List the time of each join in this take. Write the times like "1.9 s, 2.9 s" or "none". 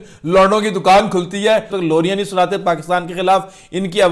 1.7 s